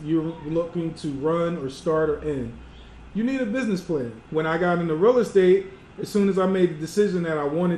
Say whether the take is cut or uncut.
cut